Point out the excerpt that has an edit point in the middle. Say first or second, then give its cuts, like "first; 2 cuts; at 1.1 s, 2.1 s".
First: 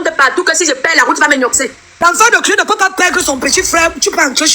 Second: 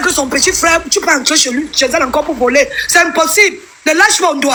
first; 1 cut; at 2.0 s